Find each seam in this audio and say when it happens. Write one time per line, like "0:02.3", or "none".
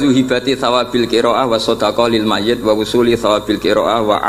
none